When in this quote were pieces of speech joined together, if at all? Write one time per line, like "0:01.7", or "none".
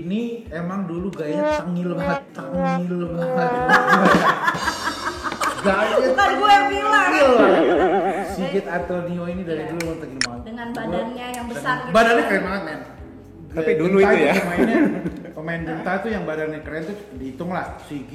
none